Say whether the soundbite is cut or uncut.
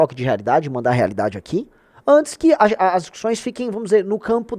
uncut